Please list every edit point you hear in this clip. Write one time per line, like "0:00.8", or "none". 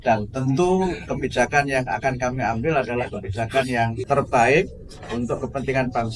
0:04.0